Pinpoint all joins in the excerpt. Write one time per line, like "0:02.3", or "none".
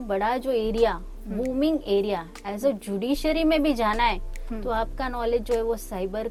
none